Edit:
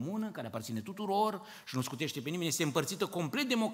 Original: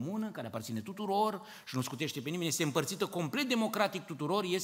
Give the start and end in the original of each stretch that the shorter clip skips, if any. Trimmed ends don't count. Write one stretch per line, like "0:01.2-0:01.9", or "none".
none